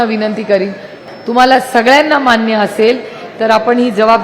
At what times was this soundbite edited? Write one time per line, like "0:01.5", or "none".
0:01.0